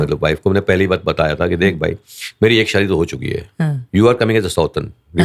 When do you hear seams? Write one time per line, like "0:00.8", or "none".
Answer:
none